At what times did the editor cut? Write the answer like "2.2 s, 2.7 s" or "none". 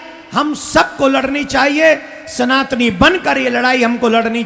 none